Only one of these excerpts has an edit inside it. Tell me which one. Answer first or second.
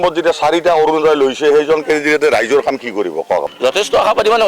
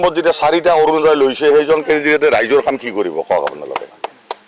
first